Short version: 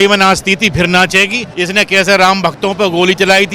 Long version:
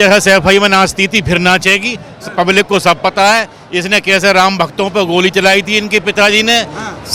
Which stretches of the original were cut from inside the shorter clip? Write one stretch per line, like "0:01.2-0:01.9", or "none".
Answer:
0:02.0-0:03.6